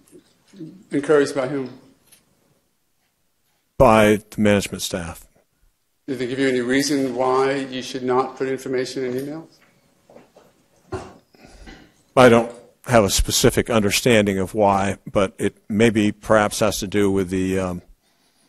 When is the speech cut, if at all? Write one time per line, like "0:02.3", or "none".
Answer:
none